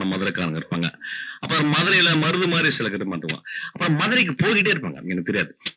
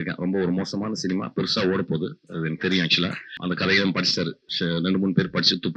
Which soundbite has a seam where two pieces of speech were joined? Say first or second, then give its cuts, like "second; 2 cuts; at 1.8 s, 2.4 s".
second; 2 cuts; at 3.4 s, 4.4 s